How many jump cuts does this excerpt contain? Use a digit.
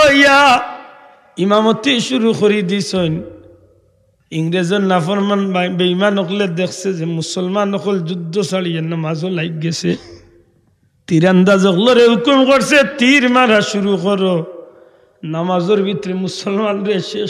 0